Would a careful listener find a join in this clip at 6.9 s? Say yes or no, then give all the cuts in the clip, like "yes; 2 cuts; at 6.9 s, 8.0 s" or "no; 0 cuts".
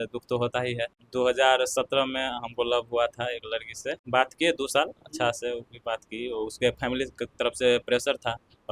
no; 2 cuts; at 1.0 s, 4.0 s